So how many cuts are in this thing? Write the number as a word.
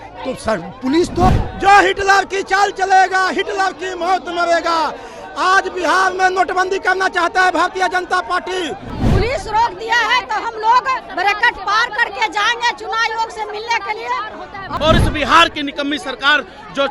three